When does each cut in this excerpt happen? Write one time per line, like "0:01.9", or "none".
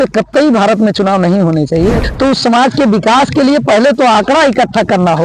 0:02.1